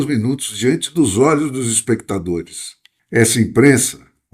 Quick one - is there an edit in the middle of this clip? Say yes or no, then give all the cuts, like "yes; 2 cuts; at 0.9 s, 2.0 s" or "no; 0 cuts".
yes; 1 cut; at 2.9 s